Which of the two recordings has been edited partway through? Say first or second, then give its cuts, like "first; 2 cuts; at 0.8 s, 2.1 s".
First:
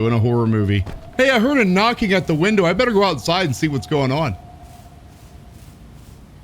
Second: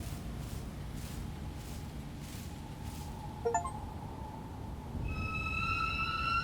first; 1 cut; at 1.0 s